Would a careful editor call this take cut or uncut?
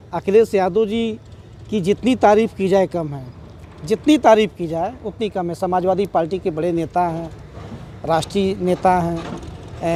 uncut